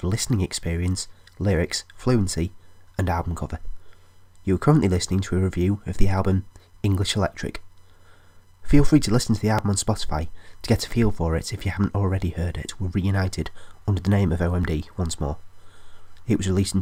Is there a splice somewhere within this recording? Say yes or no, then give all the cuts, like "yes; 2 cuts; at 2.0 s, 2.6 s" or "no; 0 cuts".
no; 0 cuts